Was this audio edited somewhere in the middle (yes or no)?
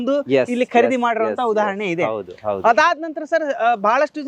no